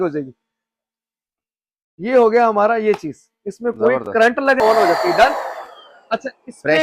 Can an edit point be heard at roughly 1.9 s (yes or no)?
no